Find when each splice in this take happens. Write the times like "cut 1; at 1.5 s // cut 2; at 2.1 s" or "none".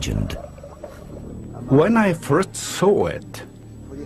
cut 1; at 1.8 s